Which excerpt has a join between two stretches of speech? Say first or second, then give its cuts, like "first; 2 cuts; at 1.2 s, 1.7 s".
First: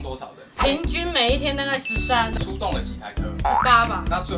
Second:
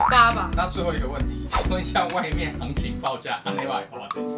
first; 1 cut; at 2.4 s